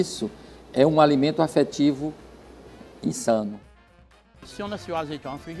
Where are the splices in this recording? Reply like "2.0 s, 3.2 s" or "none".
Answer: 4.3 s